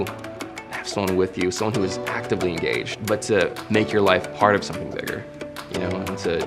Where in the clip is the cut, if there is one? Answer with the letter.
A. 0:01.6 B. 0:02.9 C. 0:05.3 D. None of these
B